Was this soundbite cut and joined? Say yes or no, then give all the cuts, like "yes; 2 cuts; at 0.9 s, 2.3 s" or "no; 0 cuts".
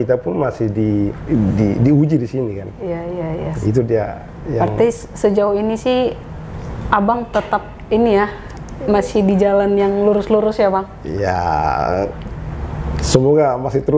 yes; 1 cut; at 1.2 s